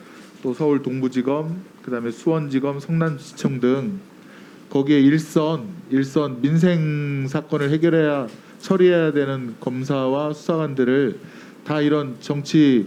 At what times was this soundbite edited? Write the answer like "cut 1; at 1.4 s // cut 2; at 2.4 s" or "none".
none